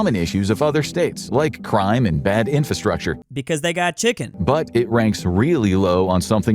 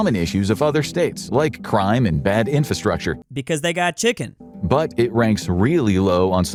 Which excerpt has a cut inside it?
first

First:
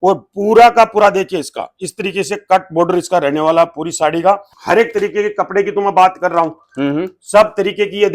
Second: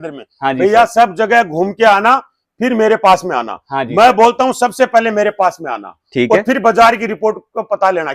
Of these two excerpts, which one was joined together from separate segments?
first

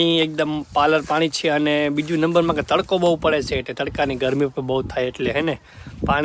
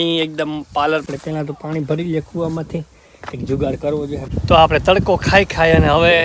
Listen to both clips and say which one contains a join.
second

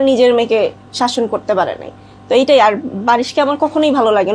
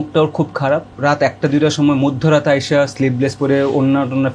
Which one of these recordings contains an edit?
second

